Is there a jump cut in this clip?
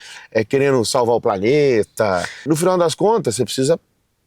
yes; 1 cut; at 2.5 s

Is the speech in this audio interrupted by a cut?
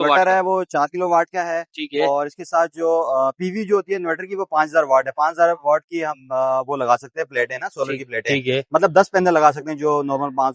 no; 0 cuts

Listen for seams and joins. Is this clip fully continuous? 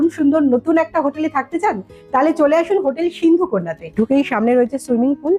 no; 1 cut; at 3.8 s

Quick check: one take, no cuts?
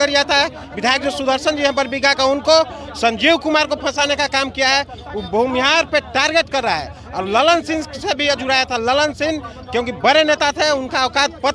yes; 0 cuts

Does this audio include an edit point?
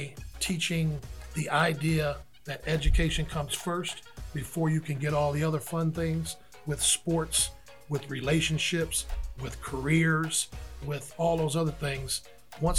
yes; 1 cut; at 1.1 s

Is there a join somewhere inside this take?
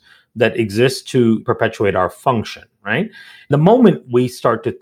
yes; 2 cuts; at 1.4 s, 3.5 s

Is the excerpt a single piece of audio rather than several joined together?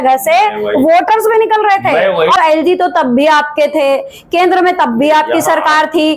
no; 1 cut; at 2.4 s

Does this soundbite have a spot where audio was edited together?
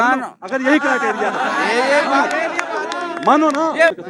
no; 0 cuts

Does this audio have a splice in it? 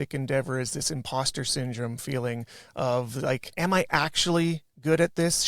yes; 1 cut; at 3.5 s

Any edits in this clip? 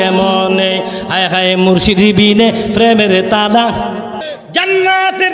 yes; 1 cut; at 4.2 s

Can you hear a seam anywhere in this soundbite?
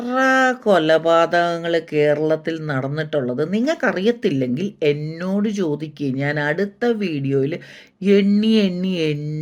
no; 0 cuts

